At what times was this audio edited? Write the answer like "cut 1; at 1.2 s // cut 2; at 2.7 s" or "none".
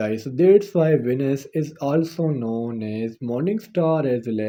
none

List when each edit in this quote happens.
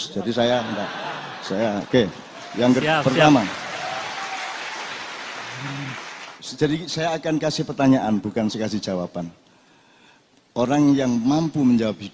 cut 1; at 6.4 s

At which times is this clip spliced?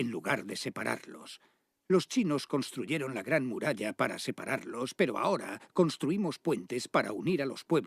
cut 1; at 5.4 s

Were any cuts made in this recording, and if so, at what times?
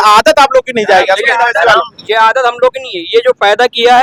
none

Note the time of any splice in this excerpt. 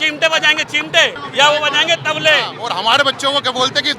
cut 1; at 1.2 s // cut 2; at 2.6 s

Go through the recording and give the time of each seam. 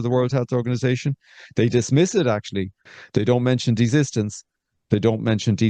none

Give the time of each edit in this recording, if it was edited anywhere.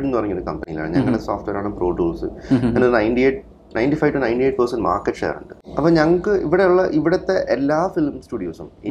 none

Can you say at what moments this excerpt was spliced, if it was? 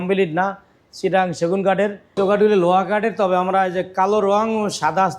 cut 1; at 2.2 s

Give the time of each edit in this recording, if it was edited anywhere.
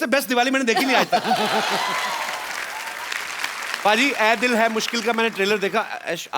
cut 1; at 3.1 s

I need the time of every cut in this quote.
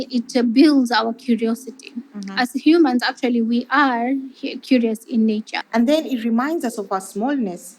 cut 1; at 5.6 s

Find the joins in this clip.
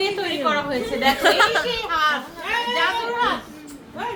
none

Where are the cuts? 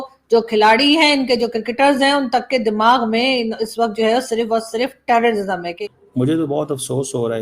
cut 1; at 5.7 s

